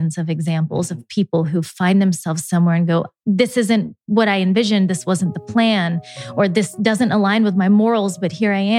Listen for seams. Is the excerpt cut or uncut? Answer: uncut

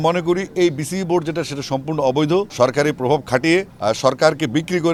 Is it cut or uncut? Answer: uncut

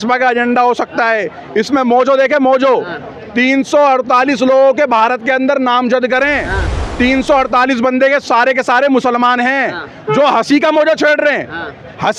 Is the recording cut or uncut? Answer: uncut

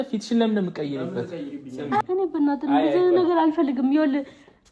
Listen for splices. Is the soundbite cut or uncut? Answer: cut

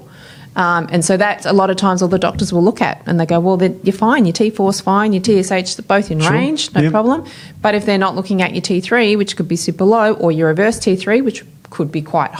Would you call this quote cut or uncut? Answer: uncut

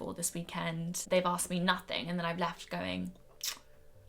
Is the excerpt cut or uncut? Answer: cut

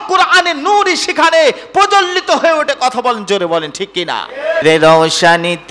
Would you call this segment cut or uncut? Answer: cut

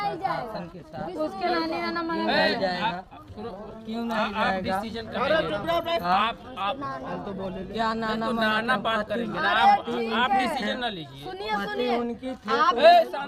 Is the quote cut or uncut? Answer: uncut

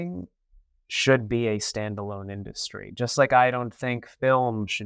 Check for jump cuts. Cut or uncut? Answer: uncut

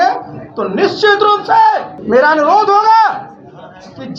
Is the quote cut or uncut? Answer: cut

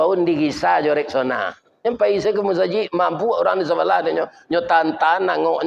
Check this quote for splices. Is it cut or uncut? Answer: cut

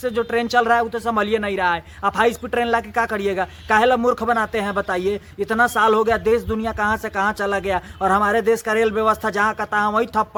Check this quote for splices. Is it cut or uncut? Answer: uncut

